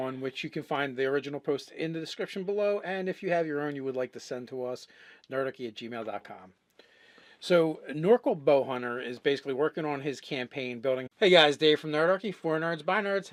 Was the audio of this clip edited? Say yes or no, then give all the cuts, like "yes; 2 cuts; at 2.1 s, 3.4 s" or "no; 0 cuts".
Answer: no; 0 cuts